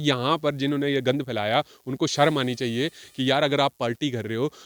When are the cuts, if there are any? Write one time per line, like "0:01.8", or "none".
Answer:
none